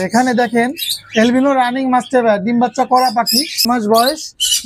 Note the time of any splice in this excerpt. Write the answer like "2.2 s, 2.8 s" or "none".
3.7 s